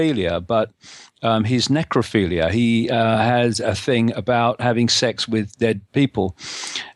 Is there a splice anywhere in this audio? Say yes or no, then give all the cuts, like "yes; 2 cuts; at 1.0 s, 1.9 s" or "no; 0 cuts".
yes; 1 cut; at 4.4 s